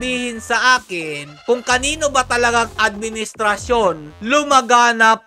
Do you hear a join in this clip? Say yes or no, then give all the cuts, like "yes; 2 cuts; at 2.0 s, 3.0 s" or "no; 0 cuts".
no; 0 cuts